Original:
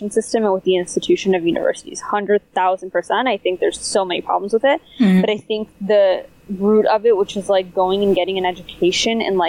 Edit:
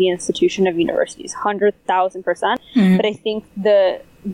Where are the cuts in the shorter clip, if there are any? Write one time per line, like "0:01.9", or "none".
0:02.6